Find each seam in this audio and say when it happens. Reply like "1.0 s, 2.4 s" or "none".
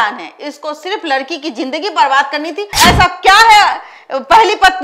2.7 s